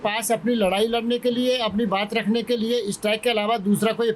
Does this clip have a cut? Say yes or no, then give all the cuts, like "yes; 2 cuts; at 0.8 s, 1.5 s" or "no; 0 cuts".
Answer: no; 0 cuts